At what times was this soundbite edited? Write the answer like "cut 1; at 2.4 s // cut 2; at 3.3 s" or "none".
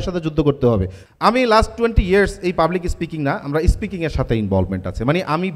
cut 1; at 1.0 s